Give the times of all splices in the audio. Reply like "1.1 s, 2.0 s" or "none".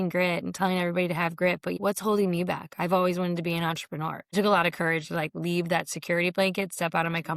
1.8 s, 4.2 s

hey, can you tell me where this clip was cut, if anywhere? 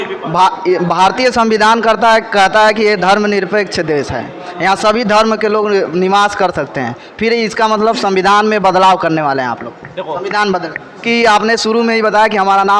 11.0 s

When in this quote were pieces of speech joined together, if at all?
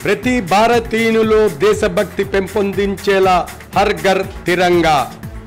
none

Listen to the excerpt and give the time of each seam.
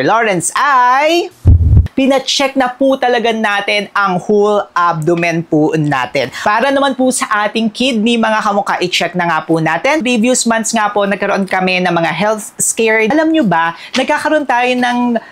1.8 s, 6.4 s, 10.0 s, 13.1 s

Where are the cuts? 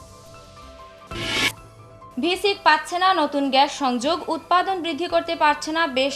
1.0 s

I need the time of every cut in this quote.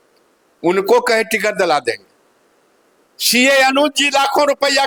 none

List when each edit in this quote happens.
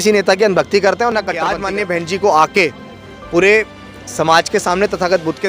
1.6 s

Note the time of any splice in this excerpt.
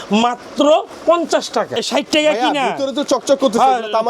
1.8 s

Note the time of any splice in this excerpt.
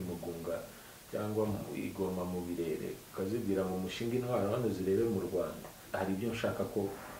5.8 s

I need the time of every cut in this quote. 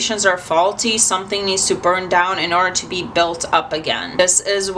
none

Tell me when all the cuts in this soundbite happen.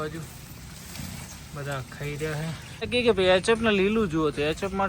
2.7 s

